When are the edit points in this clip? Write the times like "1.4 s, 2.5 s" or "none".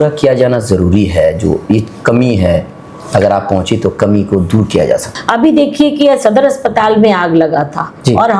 5.1 s